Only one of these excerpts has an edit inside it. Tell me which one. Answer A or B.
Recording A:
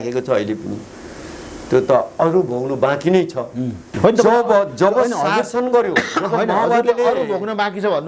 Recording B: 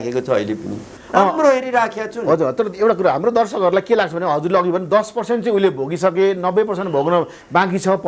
B